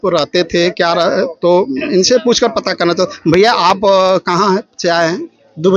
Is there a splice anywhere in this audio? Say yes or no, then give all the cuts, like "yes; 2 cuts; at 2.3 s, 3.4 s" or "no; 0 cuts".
no; 0 cuts